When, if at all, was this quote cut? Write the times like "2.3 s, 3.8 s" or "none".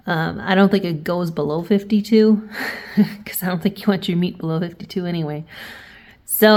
none